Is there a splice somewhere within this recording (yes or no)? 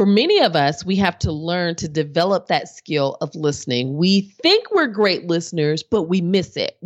no